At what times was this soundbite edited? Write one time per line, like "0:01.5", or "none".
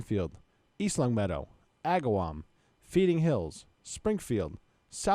none

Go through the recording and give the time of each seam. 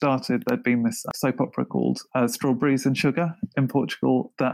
0:01.1

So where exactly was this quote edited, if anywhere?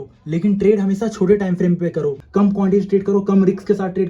0:02.2

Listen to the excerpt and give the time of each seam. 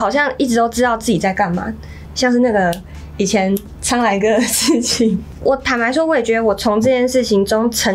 0:02.0
0:05.3

